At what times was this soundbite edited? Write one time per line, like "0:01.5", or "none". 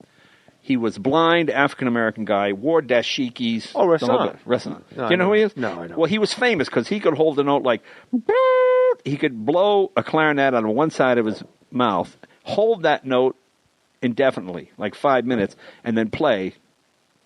0:09.4